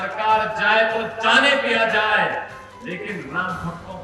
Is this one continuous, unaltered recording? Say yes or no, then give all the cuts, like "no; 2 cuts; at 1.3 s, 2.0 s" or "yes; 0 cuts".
yes; 0 cuts